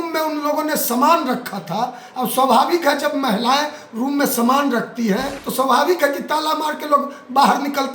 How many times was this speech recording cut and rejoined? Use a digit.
1